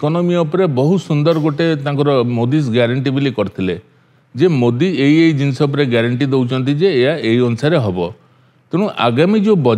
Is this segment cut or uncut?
uncut